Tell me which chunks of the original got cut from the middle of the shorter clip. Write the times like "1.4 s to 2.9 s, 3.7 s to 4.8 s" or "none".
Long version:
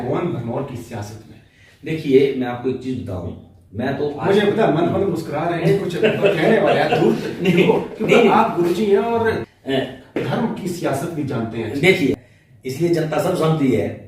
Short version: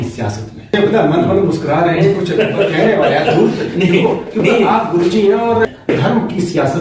1.5 s to 4.4 s, 9.3 s to 10.0 s